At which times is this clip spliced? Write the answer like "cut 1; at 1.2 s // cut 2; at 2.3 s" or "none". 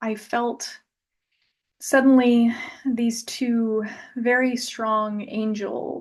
none